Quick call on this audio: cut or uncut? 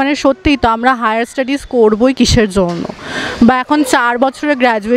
uncut